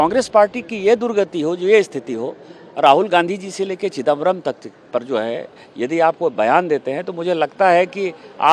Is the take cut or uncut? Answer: uncut